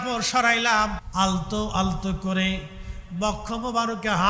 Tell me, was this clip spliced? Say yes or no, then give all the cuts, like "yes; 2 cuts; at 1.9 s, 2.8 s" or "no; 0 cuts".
yes; 1 cut; at 1.0 s